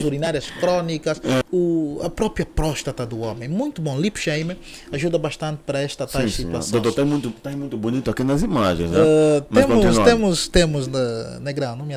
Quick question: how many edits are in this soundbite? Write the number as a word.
one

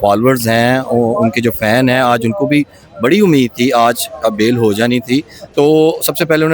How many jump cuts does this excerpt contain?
one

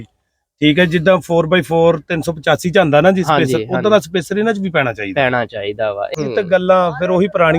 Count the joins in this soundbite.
one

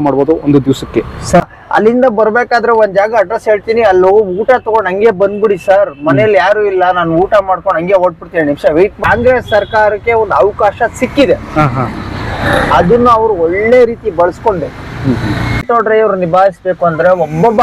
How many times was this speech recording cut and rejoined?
three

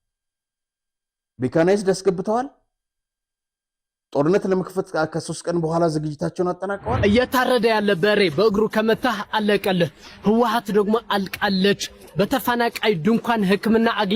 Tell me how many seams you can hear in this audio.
one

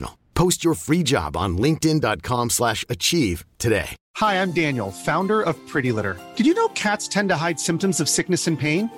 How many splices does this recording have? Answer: one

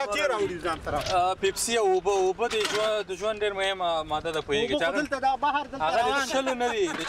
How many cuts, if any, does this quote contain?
zero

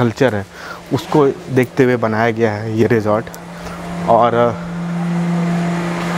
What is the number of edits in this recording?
zero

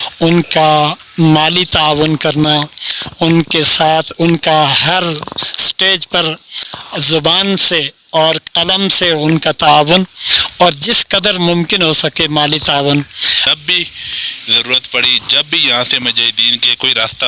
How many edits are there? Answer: one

